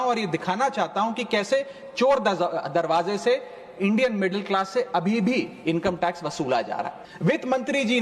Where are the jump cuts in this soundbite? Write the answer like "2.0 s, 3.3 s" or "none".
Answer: 7.0 s